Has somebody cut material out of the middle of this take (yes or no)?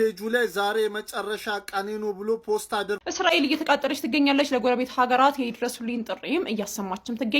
yes